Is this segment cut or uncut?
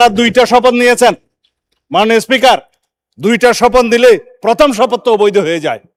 uncut